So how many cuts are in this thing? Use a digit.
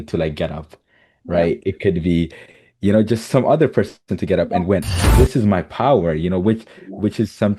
1